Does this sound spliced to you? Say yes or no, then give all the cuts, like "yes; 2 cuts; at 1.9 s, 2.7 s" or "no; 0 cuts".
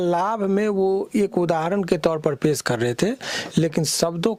no; 0 cuts